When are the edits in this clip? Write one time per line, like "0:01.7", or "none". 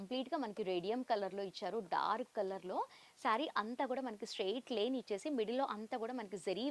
none